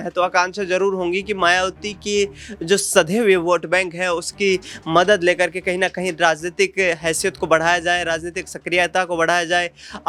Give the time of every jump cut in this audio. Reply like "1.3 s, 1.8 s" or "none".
none